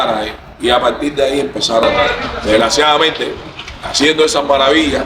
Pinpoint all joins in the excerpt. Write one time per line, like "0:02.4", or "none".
0:01.9